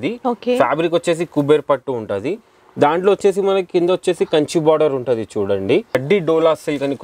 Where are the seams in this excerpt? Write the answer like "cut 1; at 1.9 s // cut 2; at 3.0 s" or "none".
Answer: cut 1; at 6.0 s